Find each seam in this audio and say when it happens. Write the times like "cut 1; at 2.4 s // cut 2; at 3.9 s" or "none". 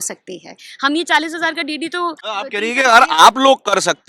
cut 1; at 2.2 s